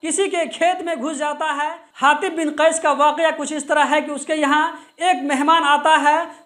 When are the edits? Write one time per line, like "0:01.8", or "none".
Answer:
0:01.8